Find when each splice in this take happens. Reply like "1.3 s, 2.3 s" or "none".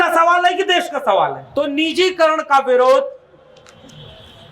1.5 s